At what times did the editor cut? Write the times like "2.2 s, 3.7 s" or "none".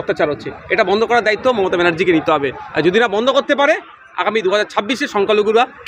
none

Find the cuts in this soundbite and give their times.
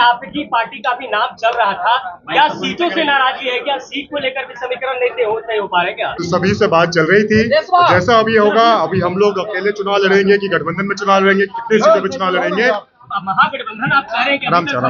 6.1 s, 13.2 s

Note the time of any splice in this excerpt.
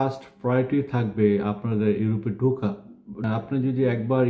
3.2 s

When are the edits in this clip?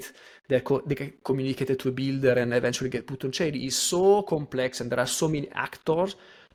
none

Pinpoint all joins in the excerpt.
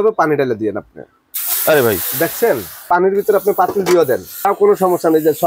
2.9 s, 4.3 s

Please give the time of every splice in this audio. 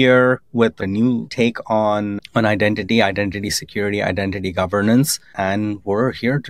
0.8 s, 2.1 s, 5.2 s

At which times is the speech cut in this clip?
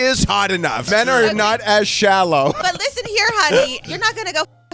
0.8 s, 2.6 s, 3.8 s

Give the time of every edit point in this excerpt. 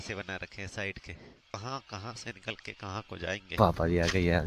1.5 s, 3.4 s

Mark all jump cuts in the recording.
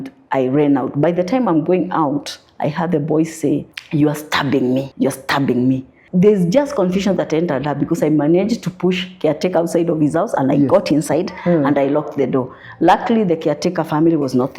3.8 s, 4.9 s, 5.9 s

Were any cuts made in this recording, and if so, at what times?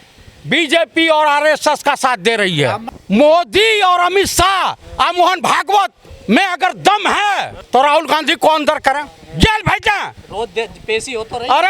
2.9 s, 6.1 s, 7.5 s

